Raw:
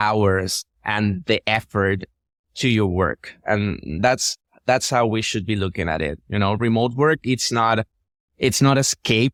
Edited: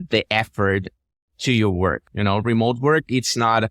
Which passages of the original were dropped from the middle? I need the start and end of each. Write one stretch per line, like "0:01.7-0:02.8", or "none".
0:03.2-0:06.2